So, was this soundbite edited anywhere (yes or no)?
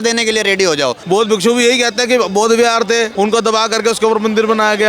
yes